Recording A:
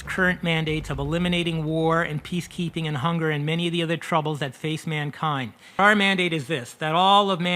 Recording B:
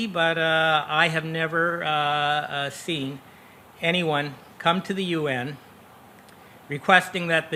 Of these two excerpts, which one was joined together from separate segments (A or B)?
A